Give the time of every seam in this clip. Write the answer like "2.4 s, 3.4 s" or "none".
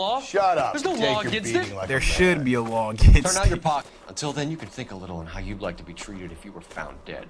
3.9 s